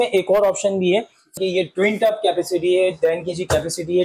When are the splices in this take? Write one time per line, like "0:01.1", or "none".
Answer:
0:01.4

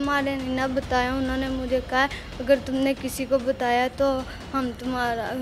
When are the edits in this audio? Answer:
none

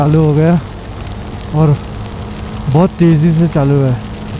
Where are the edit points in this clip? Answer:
none

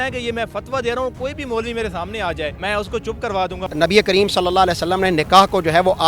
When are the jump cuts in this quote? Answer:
0:02.6
0:03.7

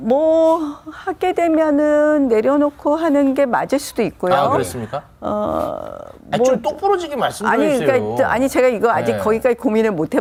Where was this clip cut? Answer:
none

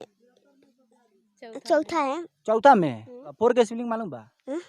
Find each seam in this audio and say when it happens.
0:03.3

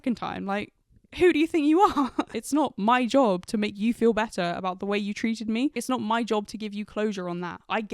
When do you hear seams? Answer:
0:02.4
0:05.8

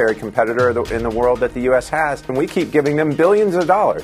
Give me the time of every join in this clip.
0:02.3

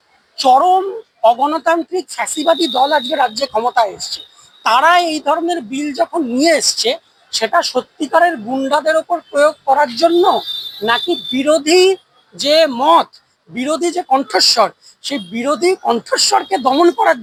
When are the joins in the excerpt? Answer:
none

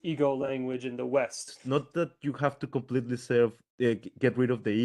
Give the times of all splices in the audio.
0:01.5

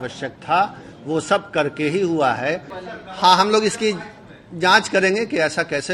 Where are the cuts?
0:02.8

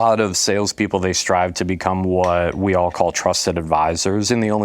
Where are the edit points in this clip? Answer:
none

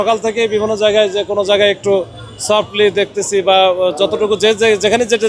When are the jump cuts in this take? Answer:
none

